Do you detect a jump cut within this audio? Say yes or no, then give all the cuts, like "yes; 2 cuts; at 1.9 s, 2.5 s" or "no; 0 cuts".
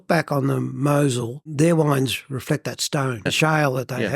yes; 1 cut; at 3.3 s